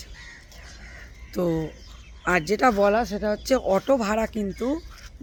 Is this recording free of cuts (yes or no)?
yes